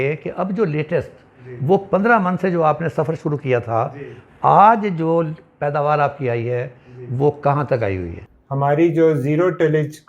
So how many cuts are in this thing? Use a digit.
1